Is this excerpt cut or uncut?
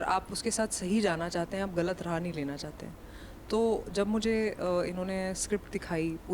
uncut